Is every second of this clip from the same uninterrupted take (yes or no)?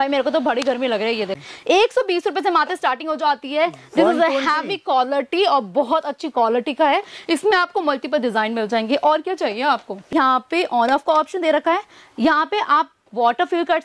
no